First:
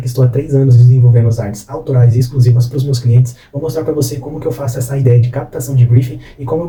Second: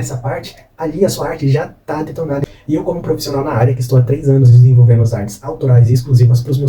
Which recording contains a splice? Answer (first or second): second